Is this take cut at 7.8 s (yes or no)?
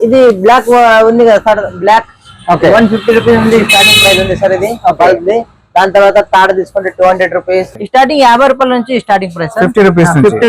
yes